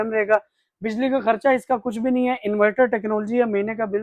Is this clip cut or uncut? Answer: uncut